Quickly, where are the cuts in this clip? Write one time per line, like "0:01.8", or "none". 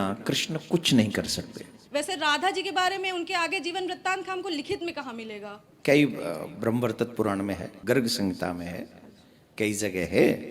0:01.7
0:05.7
0:07.7

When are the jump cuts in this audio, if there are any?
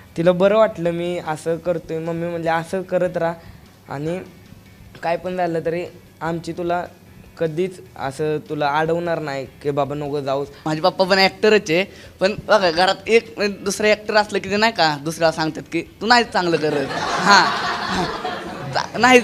0:10.6

